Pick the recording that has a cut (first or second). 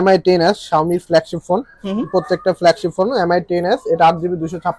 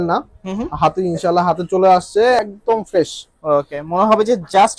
second